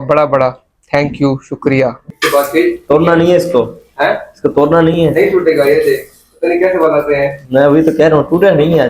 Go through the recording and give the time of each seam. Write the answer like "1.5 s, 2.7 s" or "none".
2.1 s